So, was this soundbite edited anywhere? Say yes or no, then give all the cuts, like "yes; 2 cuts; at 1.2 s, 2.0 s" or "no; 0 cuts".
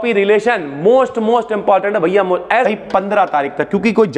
yes; 1 cut; at 2.7 s